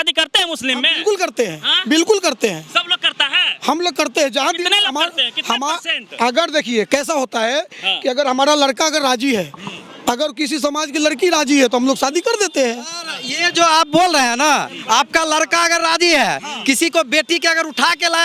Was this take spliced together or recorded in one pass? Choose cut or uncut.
uncut